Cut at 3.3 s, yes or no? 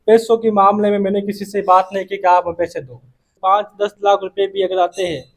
yes